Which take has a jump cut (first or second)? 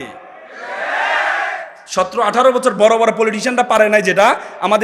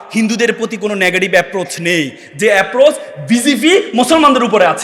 first